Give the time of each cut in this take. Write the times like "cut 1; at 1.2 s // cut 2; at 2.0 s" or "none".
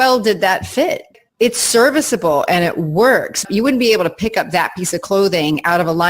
cut 1; at 1.1 s // cut 2; at 3.4 s